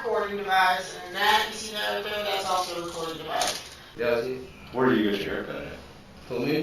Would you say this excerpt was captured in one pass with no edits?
no; 1 cut; at 4.0 s

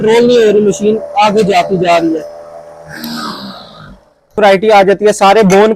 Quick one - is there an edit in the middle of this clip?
yes; 1 cut; at 4.3 s

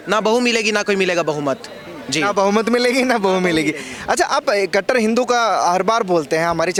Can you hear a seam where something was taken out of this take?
no; 0 cuts

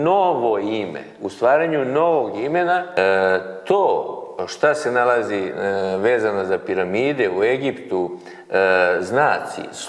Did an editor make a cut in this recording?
yes; 1 cut; at 2.9 s

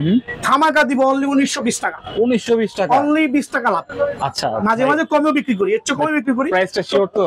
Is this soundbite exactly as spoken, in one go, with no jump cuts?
yes; 0 cuts

